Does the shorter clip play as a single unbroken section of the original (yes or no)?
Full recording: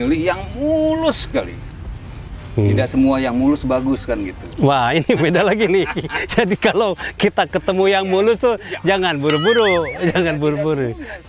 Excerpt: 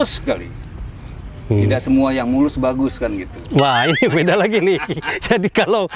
yes